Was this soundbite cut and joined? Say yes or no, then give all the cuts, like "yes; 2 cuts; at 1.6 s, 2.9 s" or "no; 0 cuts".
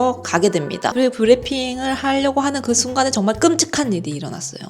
yes; 1 cut; at 0.9 s